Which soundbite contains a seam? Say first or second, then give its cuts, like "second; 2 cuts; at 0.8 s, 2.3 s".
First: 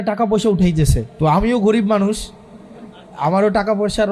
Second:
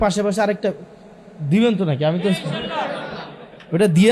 first; 1 cut; at 1.0 s